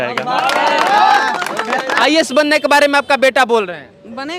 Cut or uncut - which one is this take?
cut